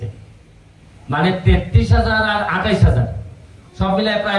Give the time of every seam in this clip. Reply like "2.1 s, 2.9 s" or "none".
none